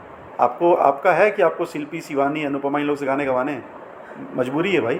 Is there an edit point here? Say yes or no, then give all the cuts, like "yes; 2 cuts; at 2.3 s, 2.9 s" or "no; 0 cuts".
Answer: no; 0 cuts